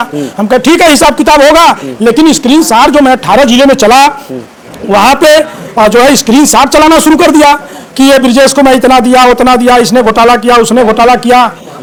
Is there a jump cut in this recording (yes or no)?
no